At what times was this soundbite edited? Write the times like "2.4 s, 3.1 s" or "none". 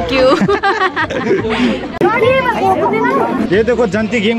none